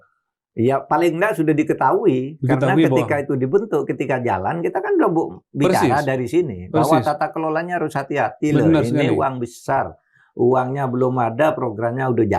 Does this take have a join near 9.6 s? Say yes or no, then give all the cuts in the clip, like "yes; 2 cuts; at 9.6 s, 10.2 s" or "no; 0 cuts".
no; 0 cuts